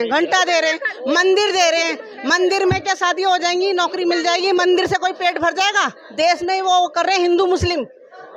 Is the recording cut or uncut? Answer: uncut